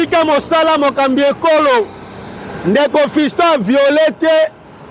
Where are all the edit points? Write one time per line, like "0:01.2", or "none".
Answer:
none